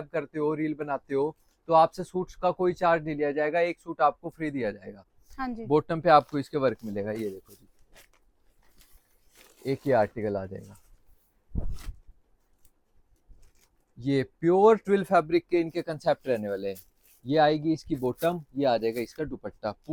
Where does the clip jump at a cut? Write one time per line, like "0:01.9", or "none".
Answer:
none

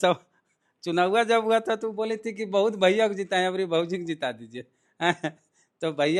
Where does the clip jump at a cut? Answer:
none

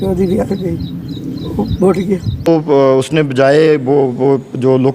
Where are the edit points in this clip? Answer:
0:02.5

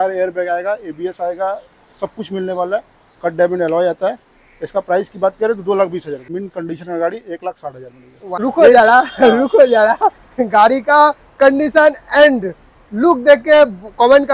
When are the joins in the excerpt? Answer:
0:06.4
0:08.3

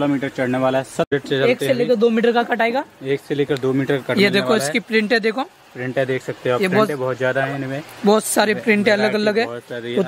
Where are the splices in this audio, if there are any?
0:01.1

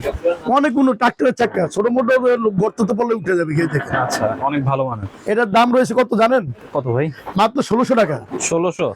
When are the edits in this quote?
0:05.1

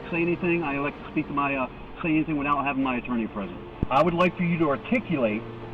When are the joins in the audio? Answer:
0:03.7

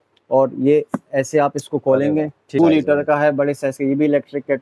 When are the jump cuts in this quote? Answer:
0:02.6

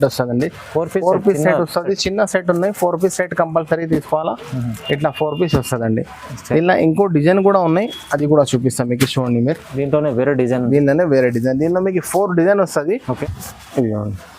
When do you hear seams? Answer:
0:13.2

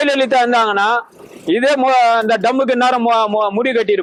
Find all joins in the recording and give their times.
none

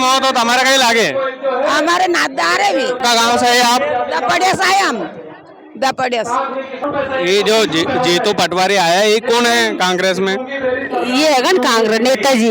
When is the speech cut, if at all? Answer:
0:03.0
0:06.8

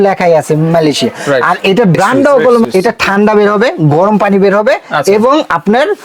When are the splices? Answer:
0:02.7

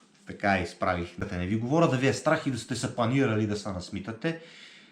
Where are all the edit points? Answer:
0:01.2

